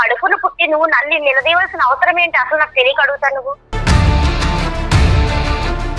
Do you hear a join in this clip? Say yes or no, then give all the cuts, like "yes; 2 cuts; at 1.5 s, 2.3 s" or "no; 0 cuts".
yes; 1 cut; at 3.8 s